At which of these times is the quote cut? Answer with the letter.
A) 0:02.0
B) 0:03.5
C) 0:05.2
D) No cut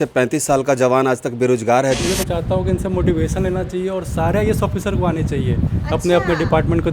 A